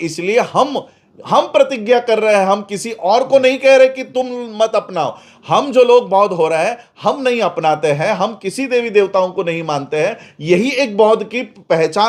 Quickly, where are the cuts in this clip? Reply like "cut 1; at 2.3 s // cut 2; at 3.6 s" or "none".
none